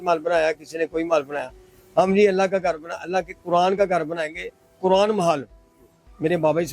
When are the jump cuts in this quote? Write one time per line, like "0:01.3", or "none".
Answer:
none